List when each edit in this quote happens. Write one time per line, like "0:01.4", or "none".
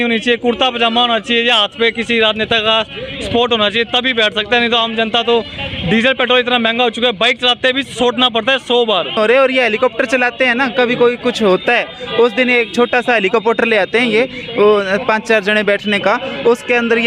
none